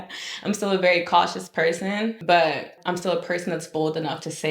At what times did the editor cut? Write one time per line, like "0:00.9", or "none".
0:02.2
0:02.8